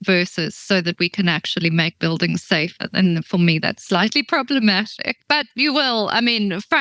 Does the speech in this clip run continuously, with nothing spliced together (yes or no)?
no